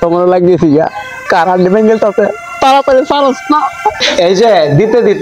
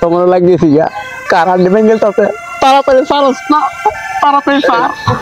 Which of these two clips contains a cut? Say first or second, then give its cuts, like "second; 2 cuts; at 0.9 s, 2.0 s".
first; 1 cut; at 4.1 s